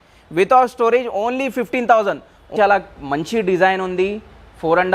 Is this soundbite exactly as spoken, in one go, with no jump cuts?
no; 1 cut; at 2.5 s

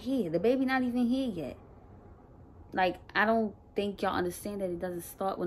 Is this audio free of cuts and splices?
yes; 0 cuts

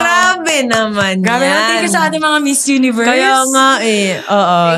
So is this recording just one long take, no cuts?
yes; 0 cuts

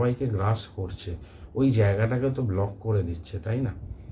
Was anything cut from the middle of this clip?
no; 0 cuts

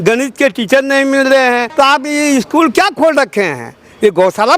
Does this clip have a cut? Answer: yes; 1 cut; at 1.7 s

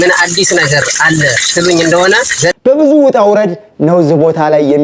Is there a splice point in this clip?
yes; 1 cut; at 2.6 s

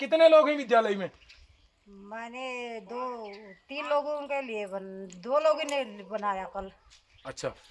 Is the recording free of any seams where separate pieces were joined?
yes; 0 cuts

